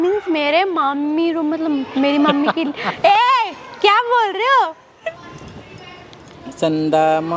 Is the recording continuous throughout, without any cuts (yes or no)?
no